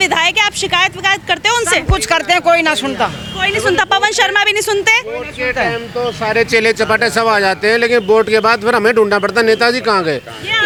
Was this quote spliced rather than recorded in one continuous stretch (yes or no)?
no